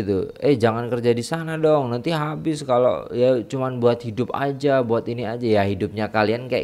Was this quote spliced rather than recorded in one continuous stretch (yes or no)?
no